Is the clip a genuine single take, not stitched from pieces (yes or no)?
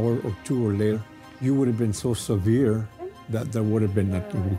no